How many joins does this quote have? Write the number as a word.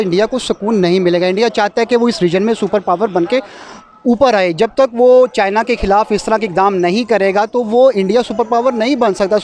zero